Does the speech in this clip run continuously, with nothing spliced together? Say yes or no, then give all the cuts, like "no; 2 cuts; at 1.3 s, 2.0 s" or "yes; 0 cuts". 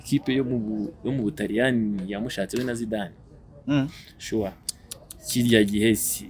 yes; 0 cuts